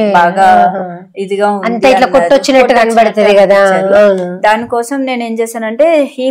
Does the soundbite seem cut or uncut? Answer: uncut